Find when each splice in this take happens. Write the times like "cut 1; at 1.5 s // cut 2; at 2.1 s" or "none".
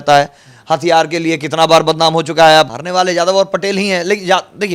cut 1; at 2.8 s